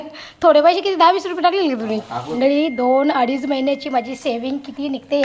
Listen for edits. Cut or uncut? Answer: cut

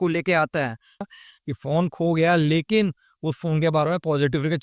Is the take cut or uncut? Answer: cut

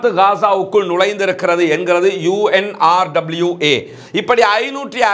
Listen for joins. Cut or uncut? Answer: uncut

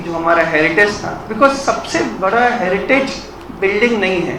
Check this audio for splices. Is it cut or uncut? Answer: uncut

